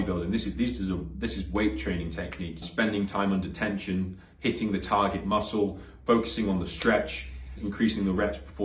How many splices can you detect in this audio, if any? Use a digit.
2